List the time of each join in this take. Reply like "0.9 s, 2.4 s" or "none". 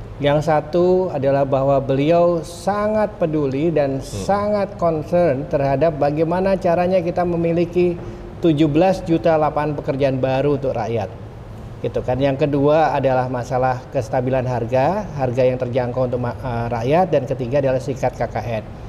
none